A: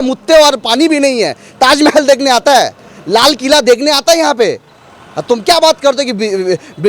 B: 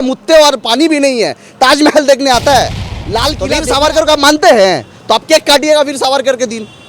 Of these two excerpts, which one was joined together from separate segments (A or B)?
B